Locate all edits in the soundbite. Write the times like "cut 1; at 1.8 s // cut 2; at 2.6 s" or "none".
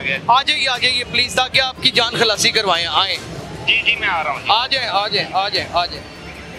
none